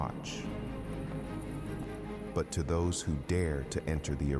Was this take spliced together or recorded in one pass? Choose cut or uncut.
uncut